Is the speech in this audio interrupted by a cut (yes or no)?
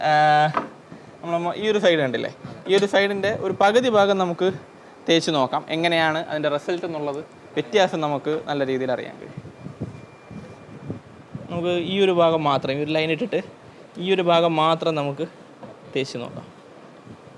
no